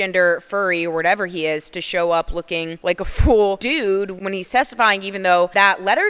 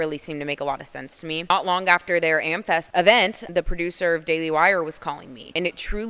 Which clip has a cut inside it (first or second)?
second